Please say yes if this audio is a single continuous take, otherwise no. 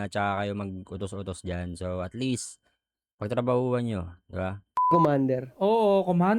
no